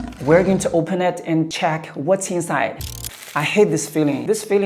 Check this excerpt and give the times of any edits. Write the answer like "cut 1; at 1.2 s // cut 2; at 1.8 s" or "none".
cut 1; at 2.7 s